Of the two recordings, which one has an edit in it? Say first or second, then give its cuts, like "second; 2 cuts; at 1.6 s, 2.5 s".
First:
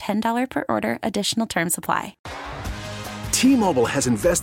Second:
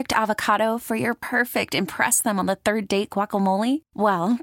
first; 1 cut; at 2.2 s